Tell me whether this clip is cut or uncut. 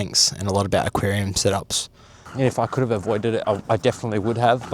cut